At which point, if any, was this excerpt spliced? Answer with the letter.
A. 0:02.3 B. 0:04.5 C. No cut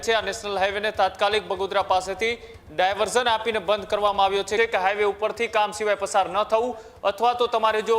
B